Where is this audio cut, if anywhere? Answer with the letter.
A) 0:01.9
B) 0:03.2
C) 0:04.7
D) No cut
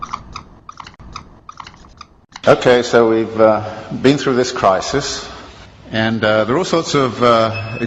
B